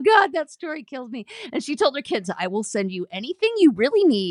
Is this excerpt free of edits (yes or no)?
yes